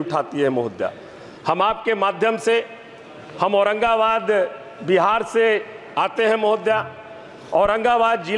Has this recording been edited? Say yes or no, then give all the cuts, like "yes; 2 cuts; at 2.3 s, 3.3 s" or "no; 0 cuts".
no; 0 cuts